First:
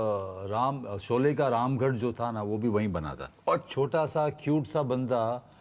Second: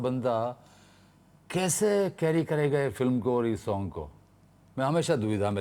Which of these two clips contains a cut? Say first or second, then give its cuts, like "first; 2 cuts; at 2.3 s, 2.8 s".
first; 1 cut; at 3.7 s